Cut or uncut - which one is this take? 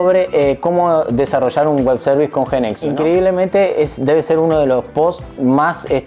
cut